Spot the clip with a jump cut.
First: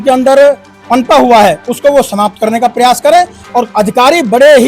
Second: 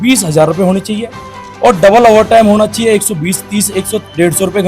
first; 1 cut; at 3.4 s

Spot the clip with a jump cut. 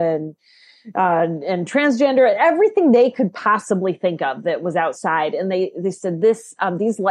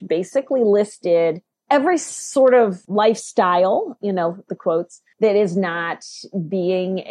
second; 3 cuts; at 1.5 s, 2.8 s, 5.0 s

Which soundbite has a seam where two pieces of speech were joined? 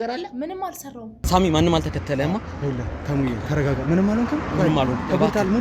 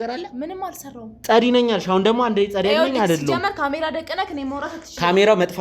first; 1 cut; at 1.1 s

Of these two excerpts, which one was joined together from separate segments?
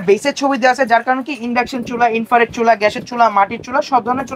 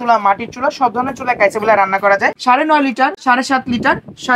second; 2 cuts; at 2.4 s, 3.2 s

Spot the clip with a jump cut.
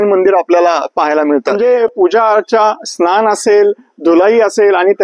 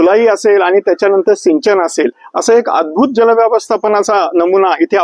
first; 1 cut; at 1.5 s

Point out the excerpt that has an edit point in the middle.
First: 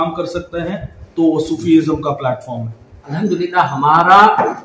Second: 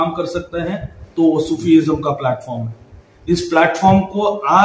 first; 1 cut; at 3.1 s

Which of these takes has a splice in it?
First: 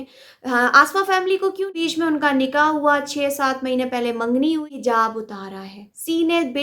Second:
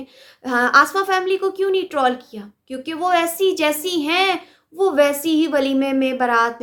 first; 2 cuts; at 1.7 s, 4.7 s

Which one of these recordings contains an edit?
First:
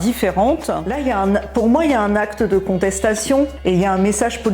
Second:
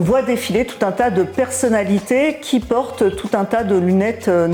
first; 2 cuts; at 0.9 s, 3.5 s

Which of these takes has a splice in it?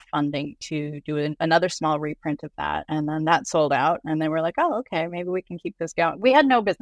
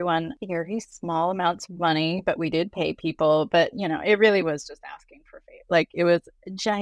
first; 2 cuts; at 1.3 s, 2.8 s

